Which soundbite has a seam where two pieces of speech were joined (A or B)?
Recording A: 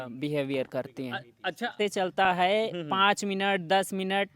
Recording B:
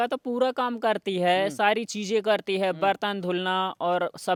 A